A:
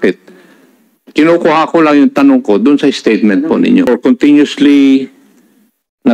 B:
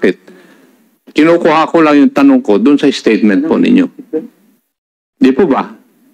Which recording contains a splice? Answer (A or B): A